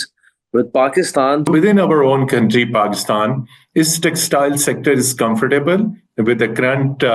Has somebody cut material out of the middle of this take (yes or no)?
yes